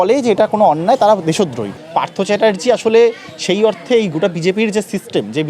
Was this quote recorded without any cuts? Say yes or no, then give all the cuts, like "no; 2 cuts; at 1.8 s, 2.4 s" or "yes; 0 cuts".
no; 1 cut; at 1.6 s